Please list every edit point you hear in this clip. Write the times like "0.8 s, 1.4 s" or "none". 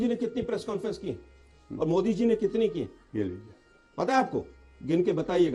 none